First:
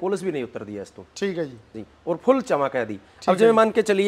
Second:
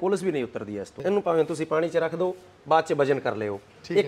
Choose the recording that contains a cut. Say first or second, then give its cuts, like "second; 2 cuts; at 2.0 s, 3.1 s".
second; 1 cut; at 1.0 s